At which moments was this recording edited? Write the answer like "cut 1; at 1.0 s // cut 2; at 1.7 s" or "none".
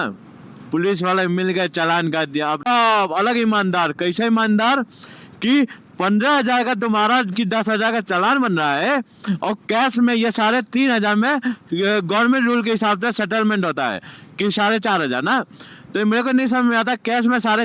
cut 1; at 2.6 s